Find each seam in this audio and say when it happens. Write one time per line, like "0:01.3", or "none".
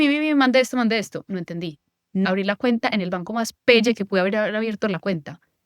0:02.2